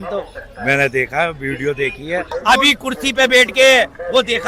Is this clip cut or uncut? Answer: cut